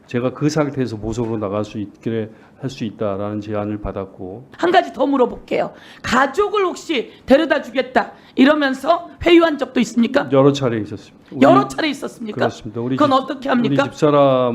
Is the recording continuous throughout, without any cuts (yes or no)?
no